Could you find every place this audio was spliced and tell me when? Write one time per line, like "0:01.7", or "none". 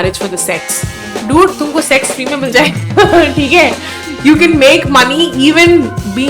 0:01.2